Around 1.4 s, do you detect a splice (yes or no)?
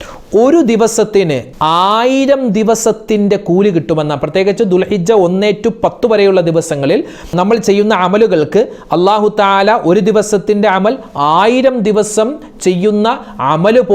yes